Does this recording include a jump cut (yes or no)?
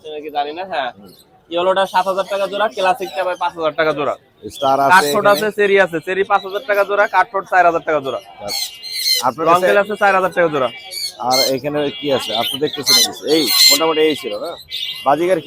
no